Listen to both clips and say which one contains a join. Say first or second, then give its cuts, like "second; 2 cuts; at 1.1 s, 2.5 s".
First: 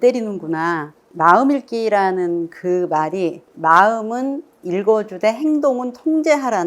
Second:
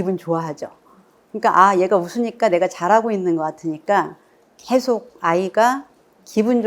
first; 2 cuts; at 1.0 s, 3.5 s